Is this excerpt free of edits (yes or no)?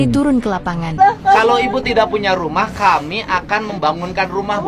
no